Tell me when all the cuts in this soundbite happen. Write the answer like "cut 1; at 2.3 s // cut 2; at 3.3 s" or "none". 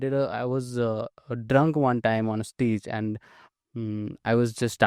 none